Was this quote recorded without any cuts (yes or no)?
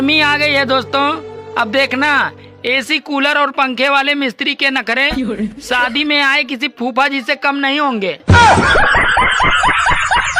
yes